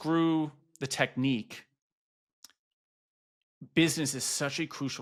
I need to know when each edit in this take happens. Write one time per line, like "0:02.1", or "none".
none